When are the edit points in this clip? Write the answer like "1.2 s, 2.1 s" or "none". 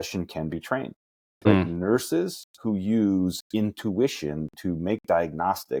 none

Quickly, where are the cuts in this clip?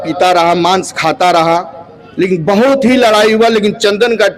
none

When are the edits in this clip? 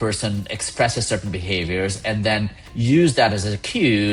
none

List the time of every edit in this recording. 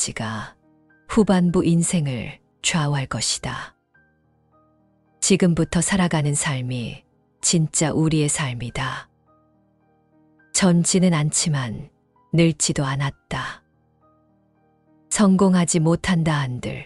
13.7 s, 15.1 s

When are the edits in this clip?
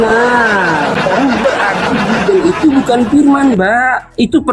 1.4 s

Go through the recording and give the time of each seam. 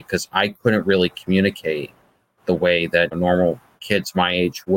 3.1 s

